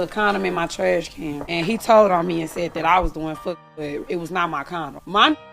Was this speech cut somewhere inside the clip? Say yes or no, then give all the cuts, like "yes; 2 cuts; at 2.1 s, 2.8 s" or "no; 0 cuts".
no; 0 cuts